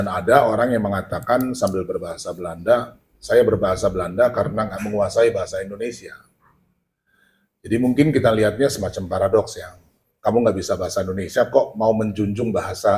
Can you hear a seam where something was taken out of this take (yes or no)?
no